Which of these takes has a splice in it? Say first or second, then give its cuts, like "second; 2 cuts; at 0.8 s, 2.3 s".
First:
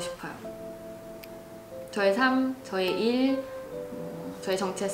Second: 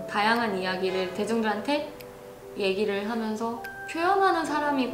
second; 1 cut; at 3.7 s